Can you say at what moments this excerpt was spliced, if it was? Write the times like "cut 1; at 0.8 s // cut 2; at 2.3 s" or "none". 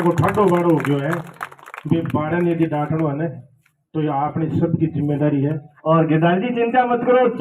cut 1; at 5.7 s

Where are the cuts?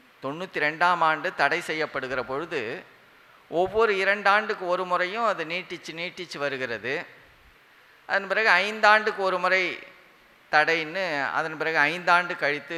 none

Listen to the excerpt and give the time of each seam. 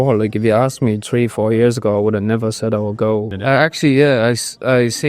cut 1; at 3.3 s

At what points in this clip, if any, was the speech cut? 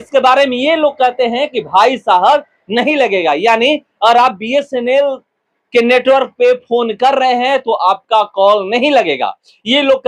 none

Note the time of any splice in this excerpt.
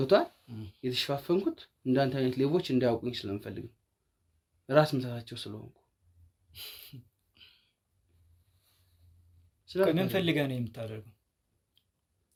none

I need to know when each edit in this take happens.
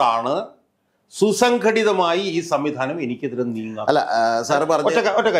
none

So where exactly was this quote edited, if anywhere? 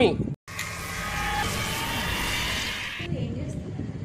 none

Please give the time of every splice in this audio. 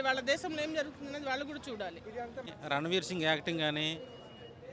cut 1; at 2.4 s

